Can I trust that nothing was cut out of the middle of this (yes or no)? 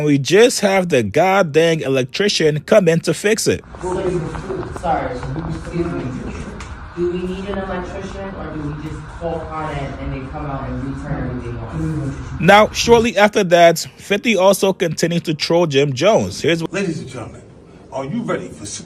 no